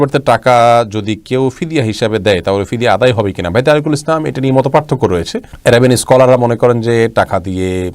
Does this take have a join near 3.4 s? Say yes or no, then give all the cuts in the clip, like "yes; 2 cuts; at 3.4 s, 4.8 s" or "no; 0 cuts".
no; 0 cuts